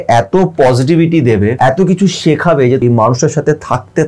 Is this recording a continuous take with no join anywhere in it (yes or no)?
no